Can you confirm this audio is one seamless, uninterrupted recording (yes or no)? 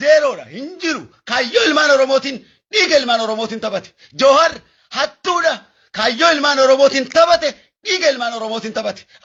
yes